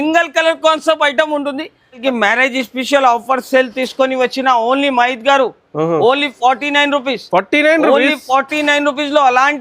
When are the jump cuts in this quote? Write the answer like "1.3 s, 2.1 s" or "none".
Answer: 2.0 s